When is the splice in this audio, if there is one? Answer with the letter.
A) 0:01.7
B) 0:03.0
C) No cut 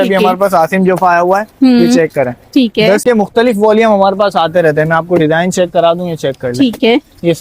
B